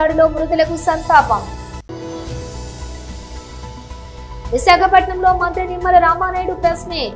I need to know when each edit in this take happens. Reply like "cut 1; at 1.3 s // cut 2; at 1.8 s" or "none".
cut 1; at 1.8 s // cut 2; at 3.5 s